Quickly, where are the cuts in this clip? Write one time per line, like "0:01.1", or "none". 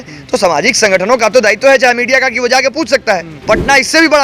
0:03.3